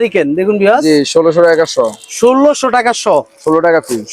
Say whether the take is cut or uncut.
uncut